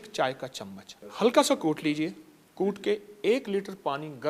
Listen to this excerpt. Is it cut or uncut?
uncut